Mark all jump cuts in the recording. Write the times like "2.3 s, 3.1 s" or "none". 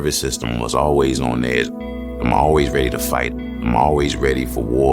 none